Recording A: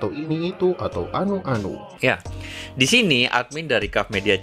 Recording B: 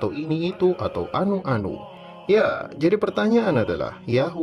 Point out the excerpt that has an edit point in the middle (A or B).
B